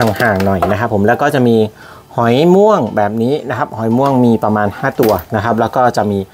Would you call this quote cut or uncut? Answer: uncut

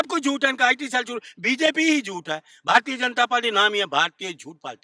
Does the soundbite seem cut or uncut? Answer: uncut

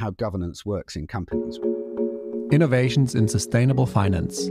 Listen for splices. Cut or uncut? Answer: cut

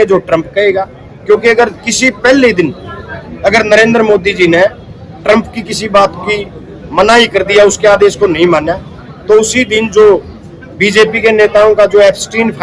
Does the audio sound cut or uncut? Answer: uncut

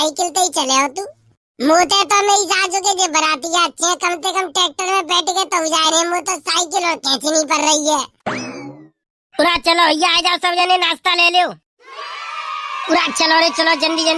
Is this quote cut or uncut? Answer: cut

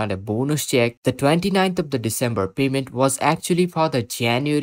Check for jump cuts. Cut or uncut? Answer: uncut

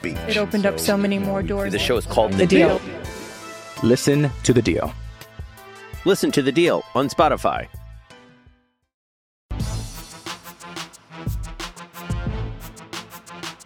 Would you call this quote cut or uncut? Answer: cut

